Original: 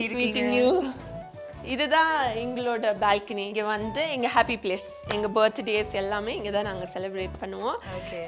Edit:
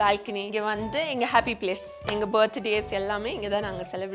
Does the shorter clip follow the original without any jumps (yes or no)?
yes